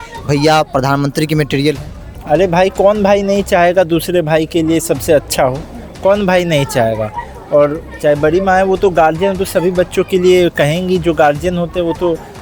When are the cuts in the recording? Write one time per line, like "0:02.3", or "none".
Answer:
none